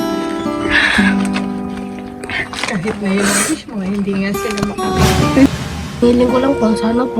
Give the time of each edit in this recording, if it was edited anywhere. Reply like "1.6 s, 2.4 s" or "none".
5.5 s